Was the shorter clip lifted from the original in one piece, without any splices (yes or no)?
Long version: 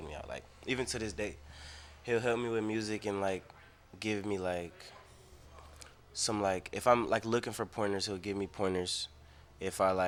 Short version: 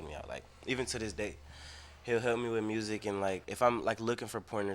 no